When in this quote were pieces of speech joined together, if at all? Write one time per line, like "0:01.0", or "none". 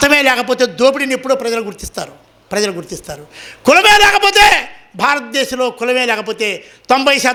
none